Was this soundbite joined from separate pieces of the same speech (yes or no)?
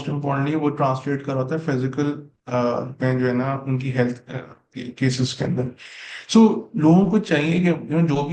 no